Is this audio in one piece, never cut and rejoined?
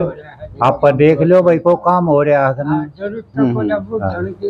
yes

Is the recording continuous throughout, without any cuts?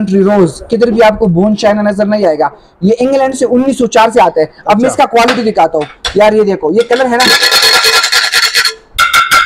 yes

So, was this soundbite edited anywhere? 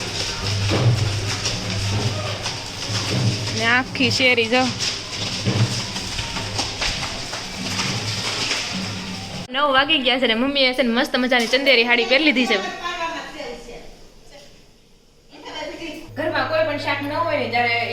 yes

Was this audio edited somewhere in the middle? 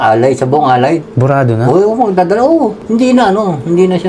no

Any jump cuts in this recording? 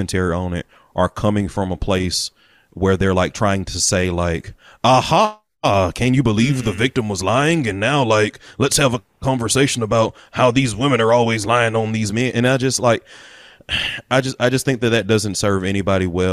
no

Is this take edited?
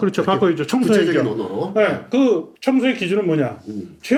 no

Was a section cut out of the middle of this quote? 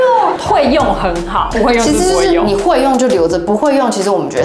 no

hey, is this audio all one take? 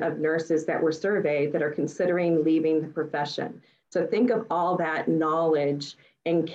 yes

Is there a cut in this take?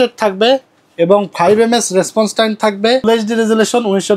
yes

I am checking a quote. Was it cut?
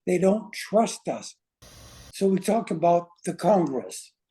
yes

